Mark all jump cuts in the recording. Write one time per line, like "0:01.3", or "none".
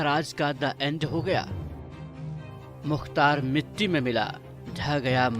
0:01.5
0:02.8